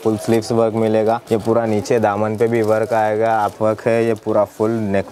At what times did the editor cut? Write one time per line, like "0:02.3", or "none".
0:01.2
0:03.5